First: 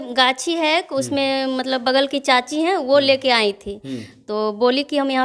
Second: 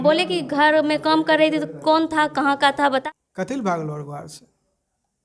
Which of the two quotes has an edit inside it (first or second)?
second